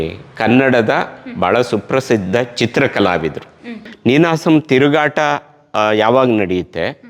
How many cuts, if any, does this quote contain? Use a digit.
1